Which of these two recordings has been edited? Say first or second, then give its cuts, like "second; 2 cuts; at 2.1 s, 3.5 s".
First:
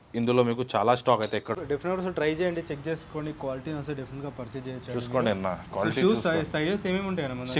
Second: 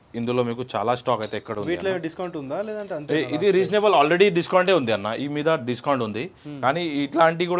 first; 1 cut; at 1.5 s